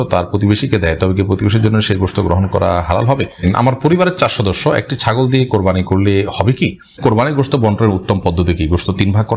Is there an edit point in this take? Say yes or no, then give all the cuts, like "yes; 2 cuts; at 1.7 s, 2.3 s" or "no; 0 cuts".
yes; 2 cuts; at 3.4 s, 7.0 s